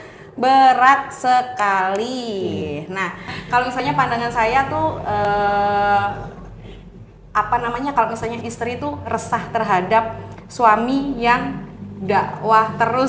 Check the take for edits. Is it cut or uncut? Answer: cut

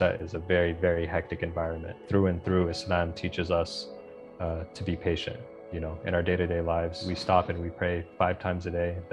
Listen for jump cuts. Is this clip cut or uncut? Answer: cut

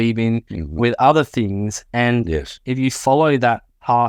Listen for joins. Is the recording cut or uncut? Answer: uncut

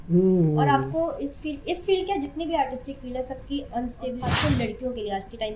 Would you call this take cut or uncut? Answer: cut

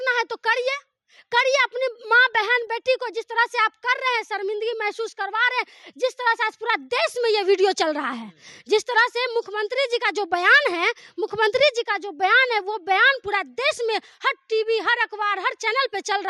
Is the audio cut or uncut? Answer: uncut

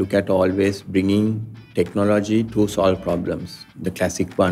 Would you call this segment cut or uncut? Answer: uncut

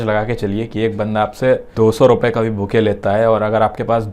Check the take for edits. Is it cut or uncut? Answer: cut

